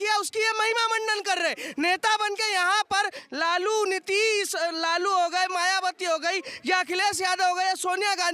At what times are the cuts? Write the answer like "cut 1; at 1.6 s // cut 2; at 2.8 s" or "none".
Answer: none

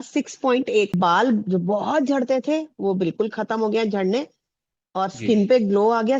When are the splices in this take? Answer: cut 1; at 1.0 s

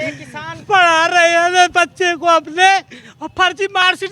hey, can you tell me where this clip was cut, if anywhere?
none

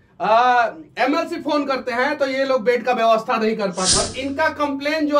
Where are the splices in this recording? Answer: cut 1; at 3.9 s

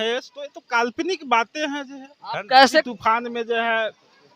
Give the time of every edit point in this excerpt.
cut 1; at 2.9 s

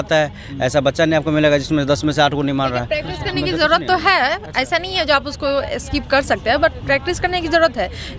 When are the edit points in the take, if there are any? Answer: none

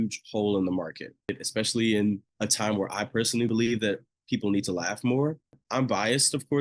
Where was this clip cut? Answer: cut 1; at 1.4 s // cut 2; at 2.3 s // cut 3; at 3.5 s // cut 4; at 5.6 s

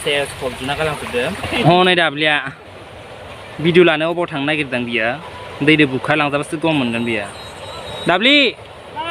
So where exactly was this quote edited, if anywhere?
cut 1; at 1.5 s

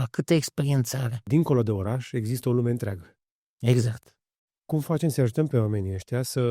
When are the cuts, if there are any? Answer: cut 1; at 1.2 s

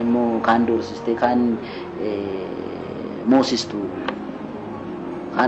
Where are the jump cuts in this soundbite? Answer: none

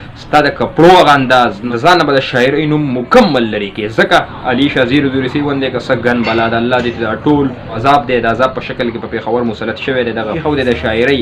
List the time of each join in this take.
cut 1; at 1.6 s // cut 2; at 4.4 s // cut 3; at 7.7 s // cut 4; at 10.3 s

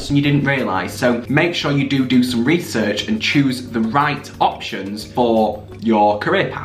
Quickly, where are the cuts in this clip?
none

